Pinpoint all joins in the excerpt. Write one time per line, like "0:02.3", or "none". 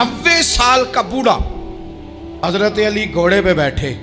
0:02.4